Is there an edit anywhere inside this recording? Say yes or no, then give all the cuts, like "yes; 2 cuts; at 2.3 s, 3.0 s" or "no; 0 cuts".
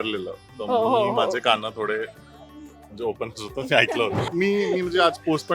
yes; 1 cut; at 4.2 s